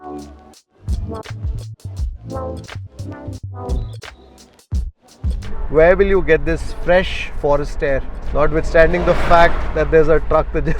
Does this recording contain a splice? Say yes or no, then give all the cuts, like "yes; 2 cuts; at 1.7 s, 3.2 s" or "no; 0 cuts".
no; 0 cuts